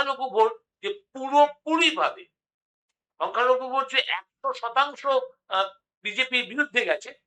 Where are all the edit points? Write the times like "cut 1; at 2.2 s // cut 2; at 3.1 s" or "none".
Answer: none